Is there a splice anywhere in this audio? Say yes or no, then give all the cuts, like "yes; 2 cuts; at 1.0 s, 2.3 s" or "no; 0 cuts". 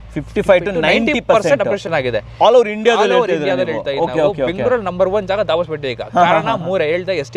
no; 0 cuts